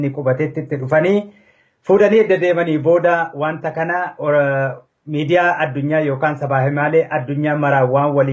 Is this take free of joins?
no; 1 cut; at 6.3 s

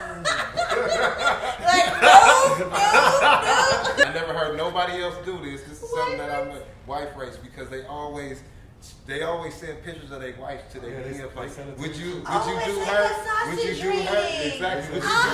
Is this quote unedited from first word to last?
no; 1 cut; at 4.1 s

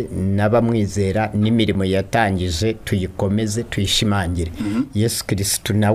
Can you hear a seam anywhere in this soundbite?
no; 0 cuts

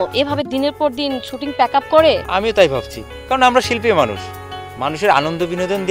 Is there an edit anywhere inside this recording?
yes; 1 cut; at 2.2 s

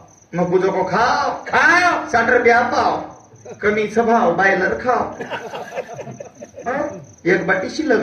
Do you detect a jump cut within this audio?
no; 0 cuts

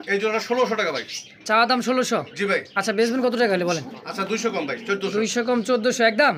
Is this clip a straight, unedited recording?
yes; 0 cuts

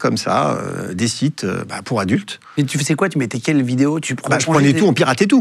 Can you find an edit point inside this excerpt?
no; 0 cuts

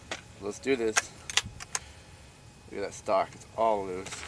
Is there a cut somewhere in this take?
yes; 1 cut; at 1.3 s

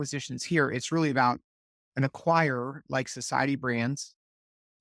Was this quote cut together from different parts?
no; 0 cuts

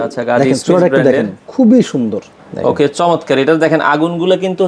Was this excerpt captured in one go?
no; 1 cut; at 2.4 s

